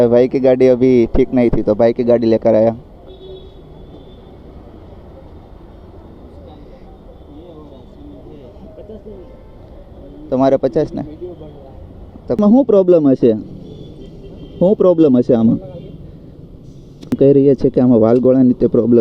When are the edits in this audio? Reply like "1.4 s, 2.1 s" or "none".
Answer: 12.4 s, 17.1 s